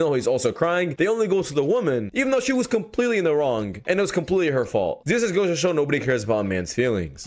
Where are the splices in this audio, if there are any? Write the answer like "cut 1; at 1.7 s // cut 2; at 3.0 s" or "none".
none